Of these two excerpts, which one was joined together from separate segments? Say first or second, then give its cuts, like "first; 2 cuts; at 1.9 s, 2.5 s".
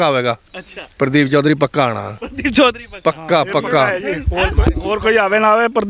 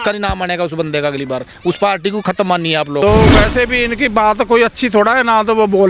second; 1 cut; at 3.0 s